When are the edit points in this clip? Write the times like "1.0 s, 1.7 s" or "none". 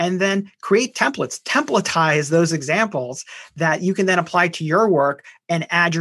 none

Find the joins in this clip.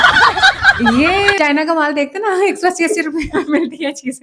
1.3 s

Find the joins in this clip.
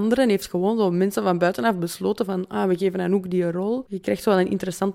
3.9 s

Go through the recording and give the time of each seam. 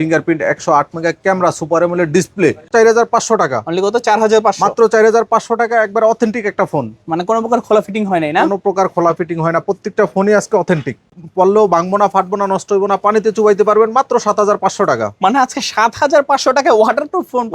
2.7 s, 11.1 s

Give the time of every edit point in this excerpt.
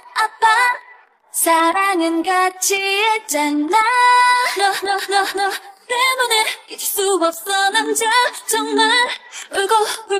none

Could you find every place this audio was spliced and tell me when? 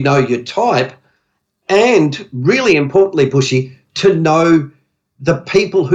none

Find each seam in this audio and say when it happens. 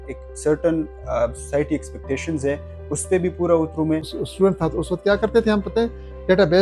4.2 s

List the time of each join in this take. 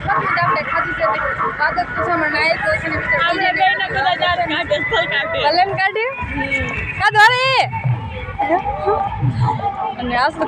none

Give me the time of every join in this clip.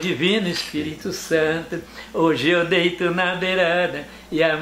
none

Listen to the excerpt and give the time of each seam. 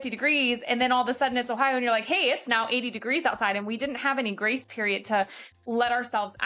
none

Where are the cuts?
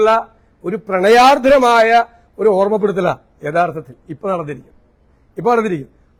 none

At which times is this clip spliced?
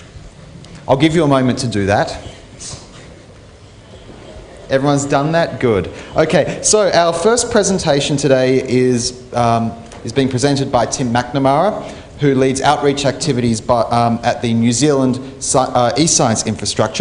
11.3 s

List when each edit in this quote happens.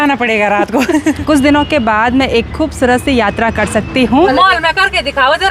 1.2 s, 4.3 s

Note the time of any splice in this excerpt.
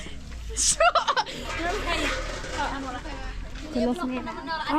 none

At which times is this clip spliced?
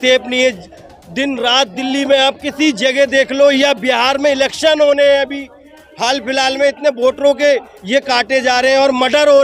none

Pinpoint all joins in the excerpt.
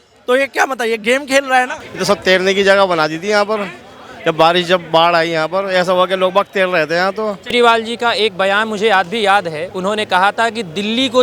1.8 s, 7.5 s

